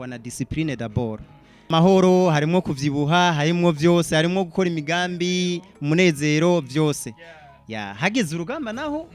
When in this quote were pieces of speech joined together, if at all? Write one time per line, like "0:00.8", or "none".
0:01.7

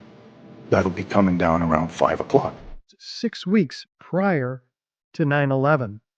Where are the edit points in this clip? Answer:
0:02.8

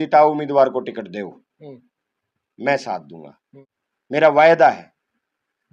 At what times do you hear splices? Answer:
none

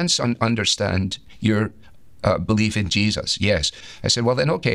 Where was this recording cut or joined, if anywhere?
0:03.8

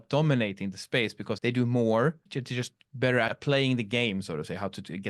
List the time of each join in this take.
0:01.3
0:02.3
0:03.3

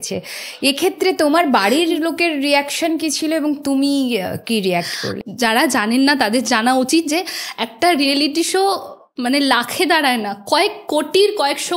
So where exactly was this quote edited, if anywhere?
0:05.2

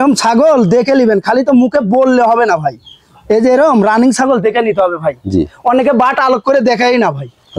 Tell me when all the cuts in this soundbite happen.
none

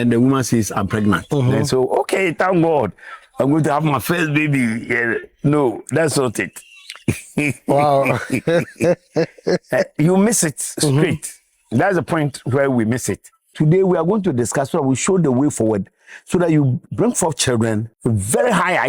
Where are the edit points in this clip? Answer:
0:13.5
0:16.9
0:17.9

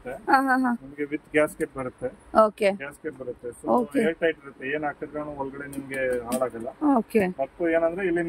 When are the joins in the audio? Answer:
none

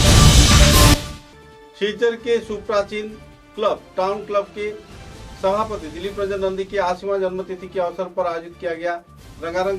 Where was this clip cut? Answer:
none

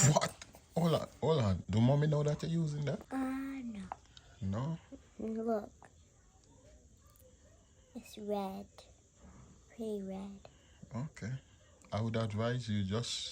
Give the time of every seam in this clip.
0:01.6
0:03.0

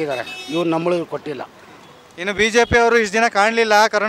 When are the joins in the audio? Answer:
none

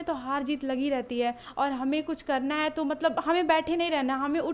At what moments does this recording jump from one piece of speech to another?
none

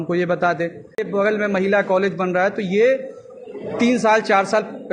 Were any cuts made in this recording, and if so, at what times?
0:01.1

